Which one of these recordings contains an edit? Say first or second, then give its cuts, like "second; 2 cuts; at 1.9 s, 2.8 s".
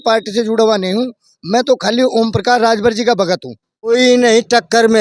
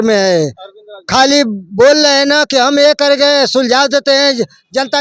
first; 1 cut; at 3.9 s